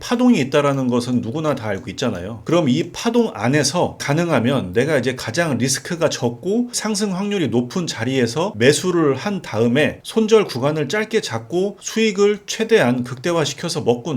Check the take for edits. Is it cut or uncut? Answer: cut